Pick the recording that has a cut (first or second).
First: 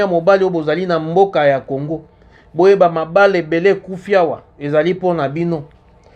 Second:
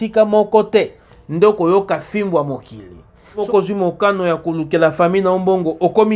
second